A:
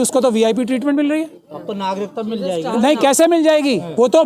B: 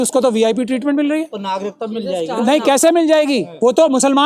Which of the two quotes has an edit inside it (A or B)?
B